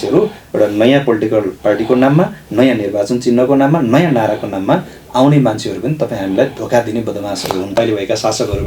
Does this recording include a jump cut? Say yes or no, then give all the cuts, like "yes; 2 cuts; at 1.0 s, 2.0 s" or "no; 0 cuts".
yes; 1 cut; at 7.8 s